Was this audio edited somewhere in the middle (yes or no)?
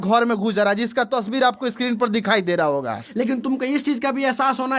yes